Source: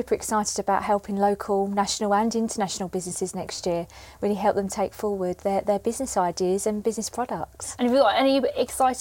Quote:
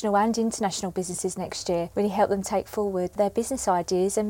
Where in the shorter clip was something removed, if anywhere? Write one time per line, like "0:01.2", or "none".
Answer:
0:01.9
0:03.1